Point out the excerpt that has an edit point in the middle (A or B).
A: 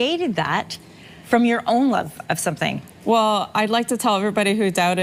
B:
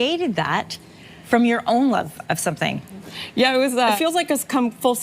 B